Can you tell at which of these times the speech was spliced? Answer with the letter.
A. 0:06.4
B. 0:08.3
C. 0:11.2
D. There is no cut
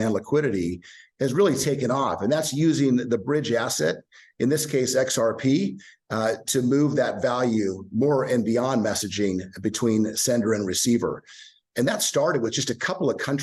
D